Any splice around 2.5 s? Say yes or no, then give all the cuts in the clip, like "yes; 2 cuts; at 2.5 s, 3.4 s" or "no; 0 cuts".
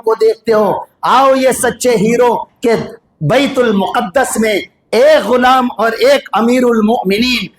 yes; 1 cut; at 2.5 s